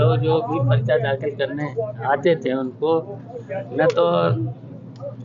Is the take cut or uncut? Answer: uncut